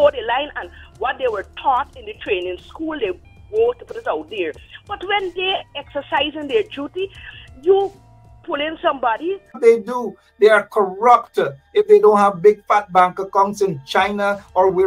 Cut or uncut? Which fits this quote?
cut